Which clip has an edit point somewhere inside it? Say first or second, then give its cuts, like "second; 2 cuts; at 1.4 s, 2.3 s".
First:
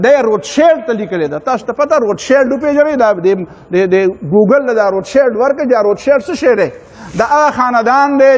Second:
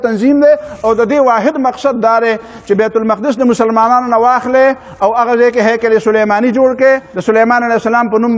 second; 1 cut; at 7.1 s